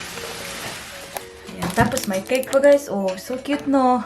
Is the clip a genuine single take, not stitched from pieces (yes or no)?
no